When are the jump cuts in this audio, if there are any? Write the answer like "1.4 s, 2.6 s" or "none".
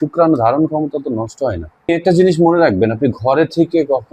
1.9 s